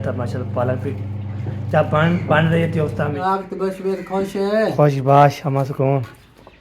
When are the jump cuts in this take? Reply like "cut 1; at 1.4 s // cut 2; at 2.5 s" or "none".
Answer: cut 1; at 3.4 s